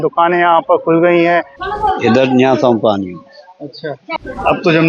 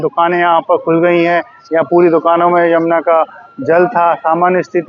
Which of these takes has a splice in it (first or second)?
first